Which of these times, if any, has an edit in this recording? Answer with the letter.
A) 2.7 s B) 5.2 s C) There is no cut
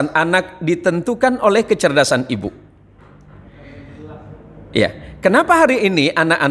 C